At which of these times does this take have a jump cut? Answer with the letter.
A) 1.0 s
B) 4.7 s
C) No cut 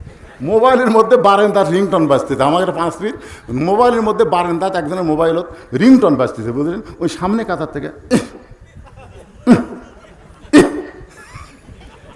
C